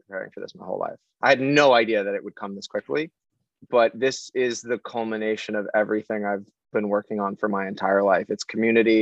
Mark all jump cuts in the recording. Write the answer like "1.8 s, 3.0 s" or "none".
none